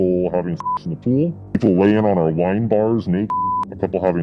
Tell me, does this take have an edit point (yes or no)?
yes